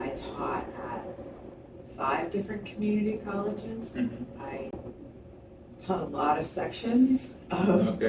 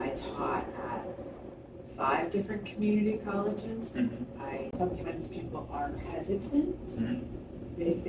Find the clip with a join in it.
second; 1 cut; at 4.7 s

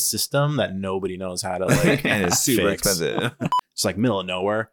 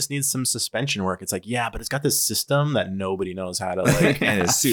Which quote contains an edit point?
first; 1 cut; at 3.5 s

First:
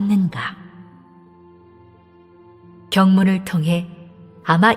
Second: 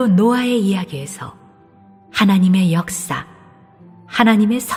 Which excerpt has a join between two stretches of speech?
first; 1 cut; at 2.2 s

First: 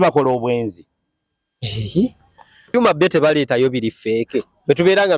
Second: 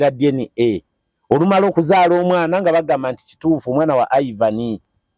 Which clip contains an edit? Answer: first; 1 cut; at 2.7 s

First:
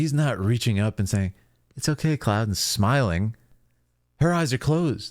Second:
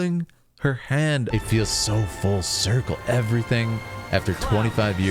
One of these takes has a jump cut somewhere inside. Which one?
second; 1 cut; at 1.3 s

